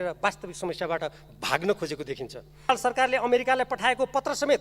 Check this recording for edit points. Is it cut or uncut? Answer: cut